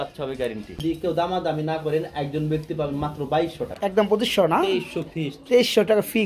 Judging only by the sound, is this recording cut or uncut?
cut